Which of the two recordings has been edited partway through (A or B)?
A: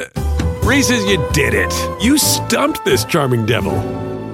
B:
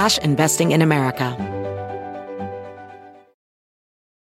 B